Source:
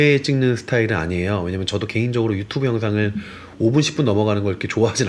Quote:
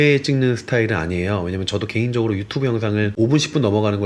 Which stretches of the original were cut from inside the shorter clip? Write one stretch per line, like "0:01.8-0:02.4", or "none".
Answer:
0:03.1-0:03.5